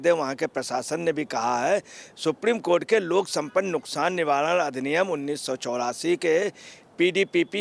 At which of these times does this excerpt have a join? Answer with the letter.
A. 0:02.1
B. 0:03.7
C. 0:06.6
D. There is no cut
D